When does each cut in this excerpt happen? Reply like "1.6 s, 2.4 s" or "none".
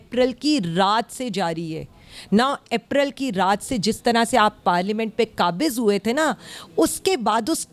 none

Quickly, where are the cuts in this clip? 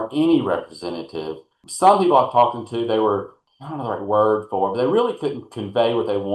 1.6 s, 3.4 s

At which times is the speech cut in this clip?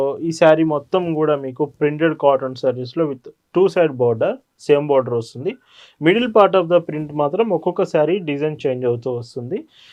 none

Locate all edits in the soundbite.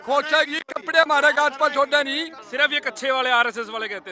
2.4 s

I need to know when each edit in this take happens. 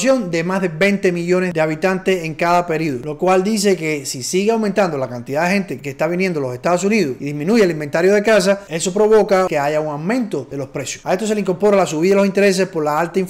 none

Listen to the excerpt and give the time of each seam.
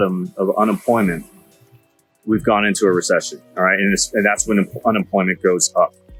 none

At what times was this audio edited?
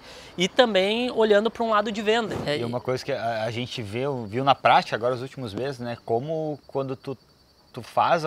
2.4 s

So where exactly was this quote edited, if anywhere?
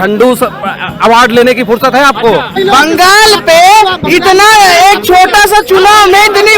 2.5 s

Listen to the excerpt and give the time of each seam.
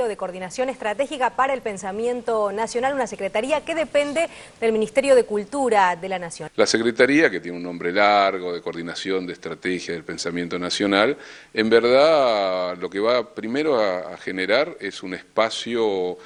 none

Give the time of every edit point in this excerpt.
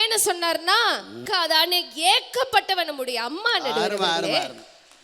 1.2 s

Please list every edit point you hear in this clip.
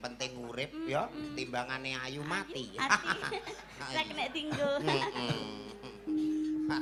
none

